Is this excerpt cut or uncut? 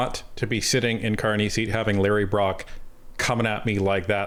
uncut